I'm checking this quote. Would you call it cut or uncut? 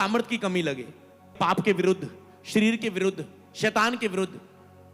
cut